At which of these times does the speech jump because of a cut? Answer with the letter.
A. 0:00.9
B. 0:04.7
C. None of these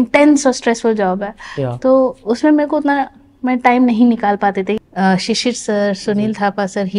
B